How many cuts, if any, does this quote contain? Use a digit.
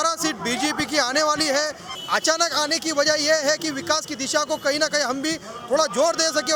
1